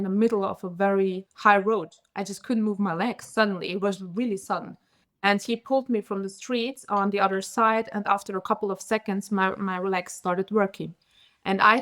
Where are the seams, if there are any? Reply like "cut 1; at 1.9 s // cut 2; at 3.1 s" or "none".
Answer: cut 1; at 1.3 s